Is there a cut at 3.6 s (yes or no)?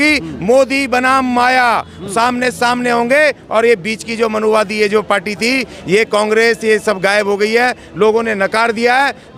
no